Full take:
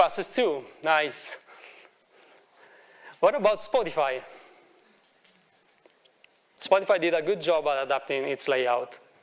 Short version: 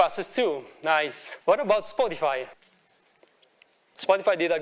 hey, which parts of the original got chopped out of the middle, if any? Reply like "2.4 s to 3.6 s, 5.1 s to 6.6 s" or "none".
1.2 s to 3.0 s, 4.3 s to 5.2 s